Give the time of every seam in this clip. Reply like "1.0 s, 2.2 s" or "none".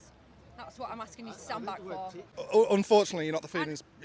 2.3 s